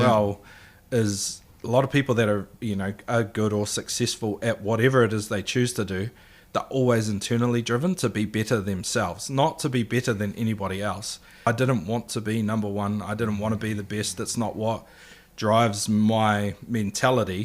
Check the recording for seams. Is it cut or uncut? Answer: cut